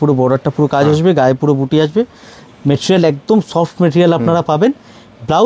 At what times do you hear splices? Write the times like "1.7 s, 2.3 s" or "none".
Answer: none